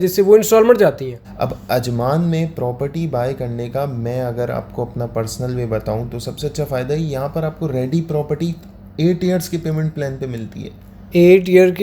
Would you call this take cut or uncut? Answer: cut